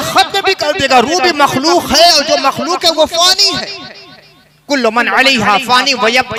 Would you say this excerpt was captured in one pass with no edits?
yes; 0 cuts

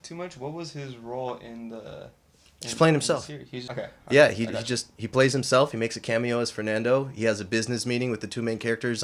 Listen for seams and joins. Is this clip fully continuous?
yes; 0 cuts

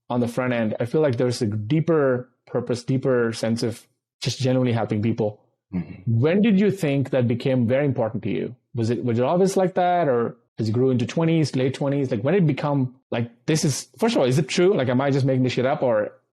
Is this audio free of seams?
yes; 0 cuts

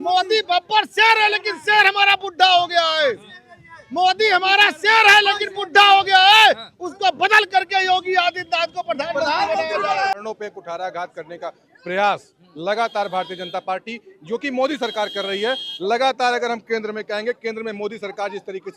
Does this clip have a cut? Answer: yes; 1 cut; at 10.1 s

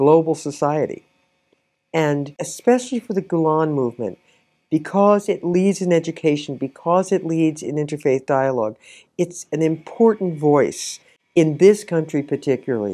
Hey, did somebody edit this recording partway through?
yes; 1 cut; at 2.3 s

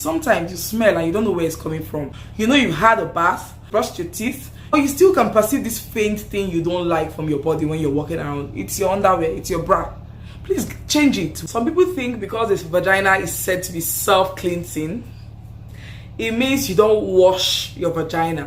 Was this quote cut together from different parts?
yes; 4 cuts; at 2.2 s, 3.6 s, 4.7 s, 11.3 s

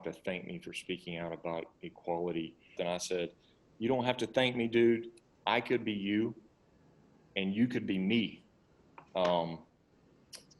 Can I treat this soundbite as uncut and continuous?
no; 1 cut; at 2.7 s

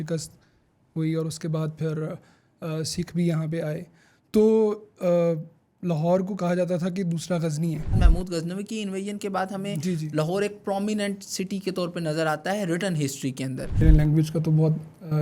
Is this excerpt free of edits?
no; 2 cuts; at 8.0 s, 13.8 s

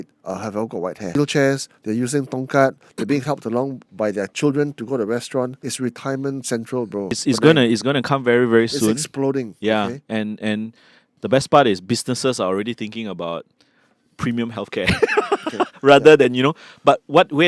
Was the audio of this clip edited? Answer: yes; 3 cuts; at 1.2 s, 5.6 s, 7.2 s

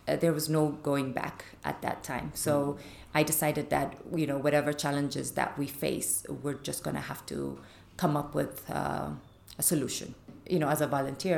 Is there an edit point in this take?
yes; 1 cut; at 10.4 s

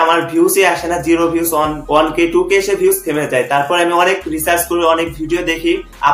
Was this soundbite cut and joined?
yes; 1 cut; at 1.8 s

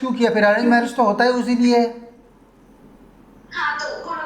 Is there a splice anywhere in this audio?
no; 0 cuts

